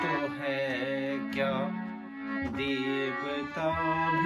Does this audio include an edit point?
no; 0 cuts

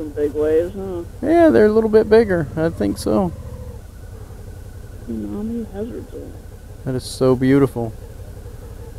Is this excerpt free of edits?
yes; 0 cuts

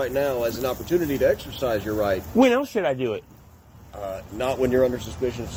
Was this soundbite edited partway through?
no; 0 cuts

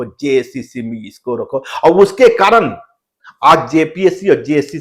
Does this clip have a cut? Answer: no; 0 cuts

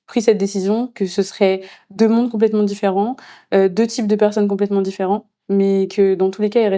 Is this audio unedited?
yes; 0 cuts

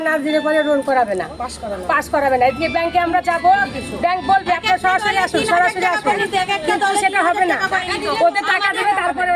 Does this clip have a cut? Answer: no; 0 cuts

